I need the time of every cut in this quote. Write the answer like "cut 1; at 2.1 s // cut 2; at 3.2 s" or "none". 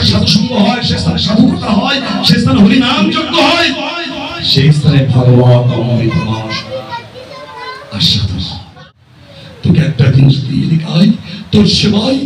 cut 1; at 8.8 s